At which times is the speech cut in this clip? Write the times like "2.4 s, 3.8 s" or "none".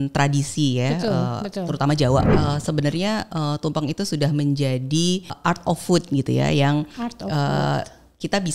2.3 s, 5.4 s